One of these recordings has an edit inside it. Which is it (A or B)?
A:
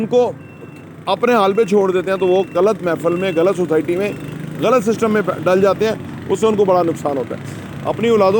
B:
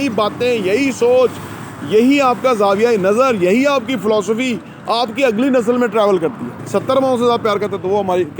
B